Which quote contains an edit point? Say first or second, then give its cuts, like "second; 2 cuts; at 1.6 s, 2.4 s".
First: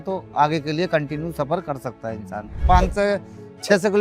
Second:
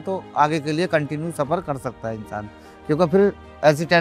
first; 1 cut; at 2.6 s